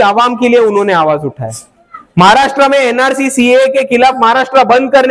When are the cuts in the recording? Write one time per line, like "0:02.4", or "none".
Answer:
none